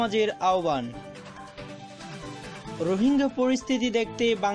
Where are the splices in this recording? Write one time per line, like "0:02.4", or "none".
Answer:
0:00.9
0:02.5